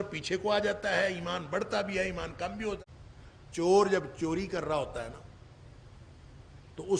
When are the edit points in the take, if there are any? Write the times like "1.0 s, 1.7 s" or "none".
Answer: 2.8 s